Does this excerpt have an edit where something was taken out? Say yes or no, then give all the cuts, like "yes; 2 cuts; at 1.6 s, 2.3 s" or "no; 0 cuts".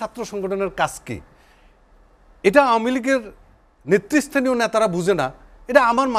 no; 0 cuts